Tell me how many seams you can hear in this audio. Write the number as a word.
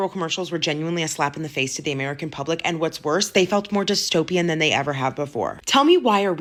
zero